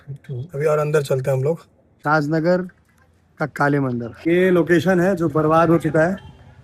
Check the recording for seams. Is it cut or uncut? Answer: cut